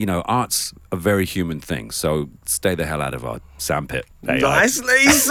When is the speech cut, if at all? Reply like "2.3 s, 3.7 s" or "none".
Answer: none